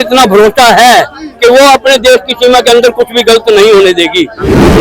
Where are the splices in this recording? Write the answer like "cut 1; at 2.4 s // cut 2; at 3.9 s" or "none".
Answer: none